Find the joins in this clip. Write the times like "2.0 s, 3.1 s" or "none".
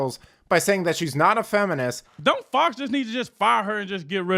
2.0 s